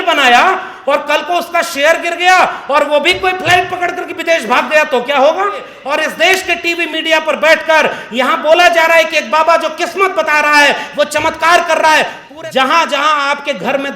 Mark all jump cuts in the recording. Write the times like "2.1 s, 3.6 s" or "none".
5.8 s, 12.2 s